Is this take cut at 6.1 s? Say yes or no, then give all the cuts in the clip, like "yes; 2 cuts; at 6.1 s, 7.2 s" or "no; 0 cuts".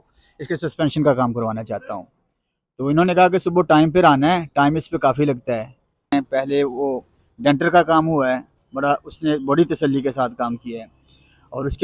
yes; 1 cut; at 6.1 s